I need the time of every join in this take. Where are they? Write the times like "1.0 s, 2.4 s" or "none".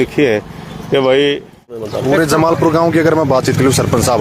1.9 s